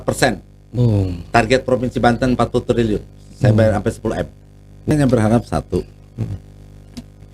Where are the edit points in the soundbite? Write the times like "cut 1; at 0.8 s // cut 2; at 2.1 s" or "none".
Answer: cut 1; at 4.9 s

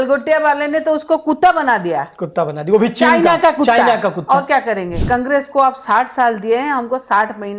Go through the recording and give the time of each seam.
cut 1; at 5.0 s

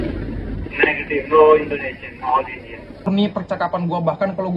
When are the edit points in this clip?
cut 1; at 3.1 s

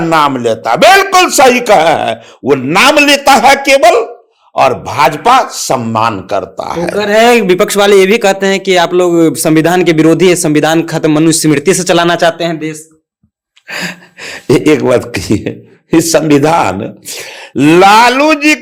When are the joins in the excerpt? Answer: none

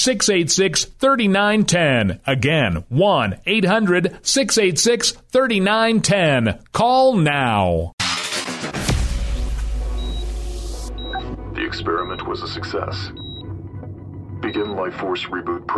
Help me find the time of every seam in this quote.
cut 1; at 7.9 s

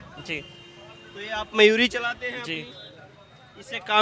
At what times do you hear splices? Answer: none

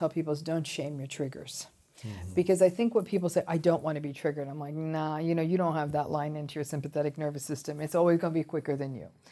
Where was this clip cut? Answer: none

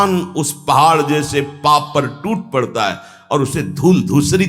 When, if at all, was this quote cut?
none

